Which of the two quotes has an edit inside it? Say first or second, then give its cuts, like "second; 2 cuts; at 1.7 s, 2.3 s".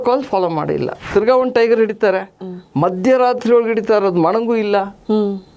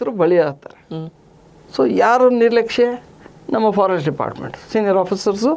first; 1 cut; at 1.1 s